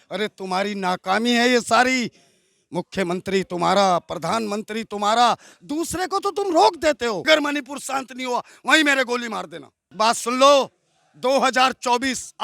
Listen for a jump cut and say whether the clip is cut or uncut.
cut